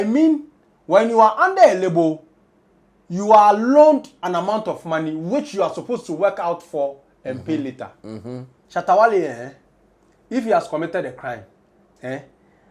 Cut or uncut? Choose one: cut